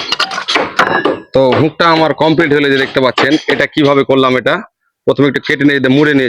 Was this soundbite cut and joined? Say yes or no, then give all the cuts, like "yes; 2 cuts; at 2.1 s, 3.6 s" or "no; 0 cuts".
no; 0 cuts